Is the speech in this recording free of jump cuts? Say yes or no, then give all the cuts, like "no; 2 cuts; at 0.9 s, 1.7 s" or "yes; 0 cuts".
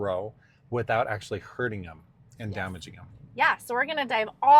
yes; 0 cuts